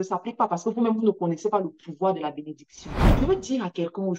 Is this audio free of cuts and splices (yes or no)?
no